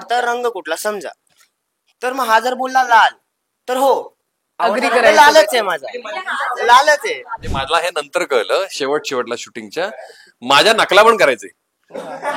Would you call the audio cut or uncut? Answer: cut